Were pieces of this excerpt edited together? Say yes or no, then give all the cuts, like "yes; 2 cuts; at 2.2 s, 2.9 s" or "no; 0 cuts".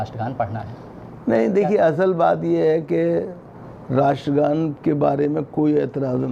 no; 0 cuts